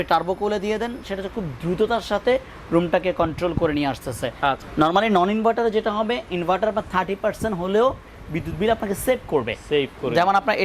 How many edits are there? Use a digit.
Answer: 1